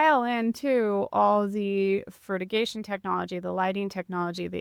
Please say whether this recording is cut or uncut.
uncut